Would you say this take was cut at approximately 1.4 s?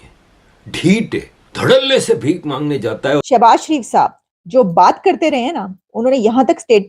yes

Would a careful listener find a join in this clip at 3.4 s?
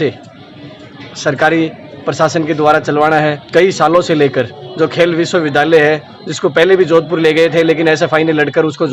yes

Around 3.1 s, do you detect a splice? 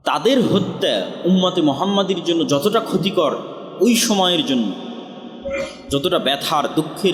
no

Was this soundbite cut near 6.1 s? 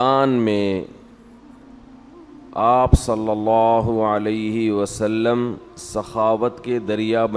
no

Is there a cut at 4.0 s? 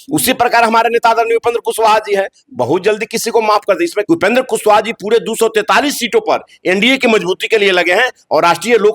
yes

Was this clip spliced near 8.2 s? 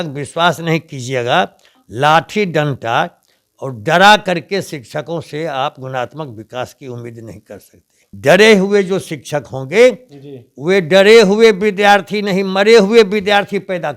yes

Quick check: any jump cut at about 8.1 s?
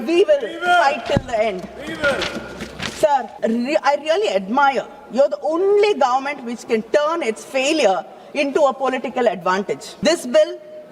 no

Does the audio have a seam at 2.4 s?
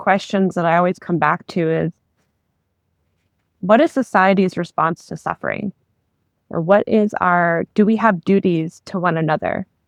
no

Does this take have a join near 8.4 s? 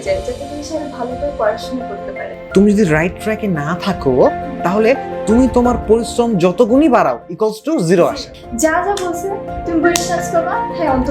yes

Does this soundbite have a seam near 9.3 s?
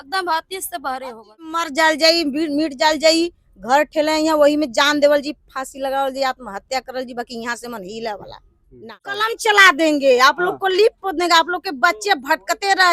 yes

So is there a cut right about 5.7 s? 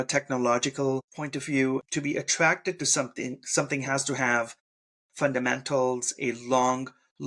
no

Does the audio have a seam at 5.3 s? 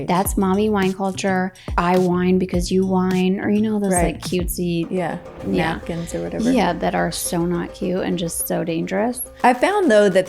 no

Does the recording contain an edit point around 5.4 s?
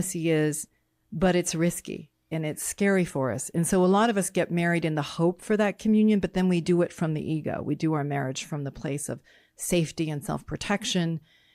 no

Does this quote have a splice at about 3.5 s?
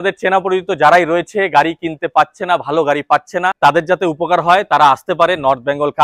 yes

